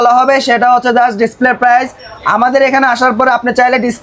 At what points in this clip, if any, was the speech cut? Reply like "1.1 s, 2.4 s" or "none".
none